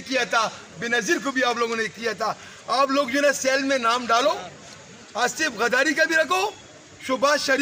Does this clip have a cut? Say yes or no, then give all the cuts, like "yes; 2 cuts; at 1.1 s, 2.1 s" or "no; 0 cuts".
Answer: no; 0 cuts